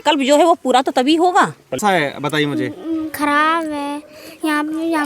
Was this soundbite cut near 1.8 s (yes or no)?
yes